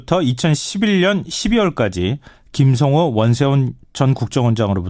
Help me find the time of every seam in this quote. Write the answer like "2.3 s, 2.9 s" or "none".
3.0 s